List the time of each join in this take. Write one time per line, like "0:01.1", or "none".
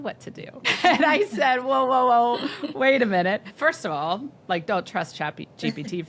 0:03.5